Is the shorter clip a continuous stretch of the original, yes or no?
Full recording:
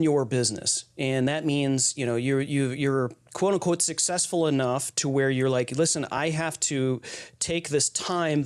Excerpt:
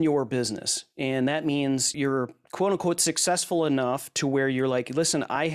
no